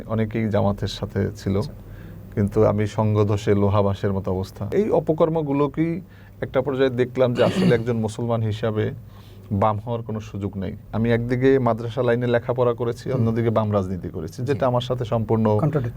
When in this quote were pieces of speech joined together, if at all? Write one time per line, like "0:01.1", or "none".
0:04.7
0:10.8

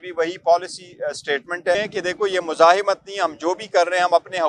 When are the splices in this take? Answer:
0:01.8

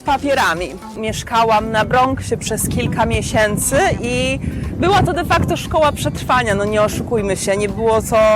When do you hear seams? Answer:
0:01.1

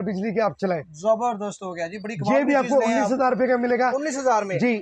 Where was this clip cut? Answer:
none

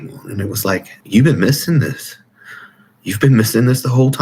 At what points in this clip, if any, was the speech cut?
0:00.9

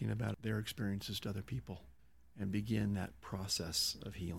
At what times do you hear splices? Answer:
none

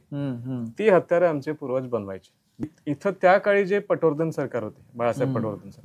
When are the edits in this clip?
0:02.7

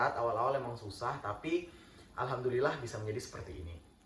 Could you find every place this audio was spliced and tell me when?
none

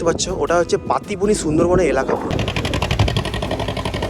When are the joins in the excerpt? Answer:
0:02.3

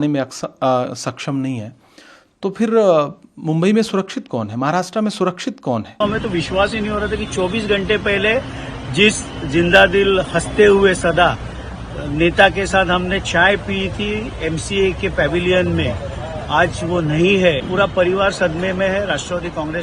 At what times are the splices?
0:06.0
0:17.6

